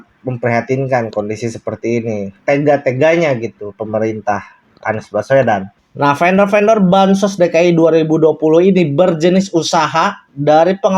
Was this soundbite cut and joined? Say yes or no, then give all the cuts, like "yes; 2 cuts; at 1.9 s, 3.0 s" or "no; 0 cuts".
yes; 1 cut; at 5.8 s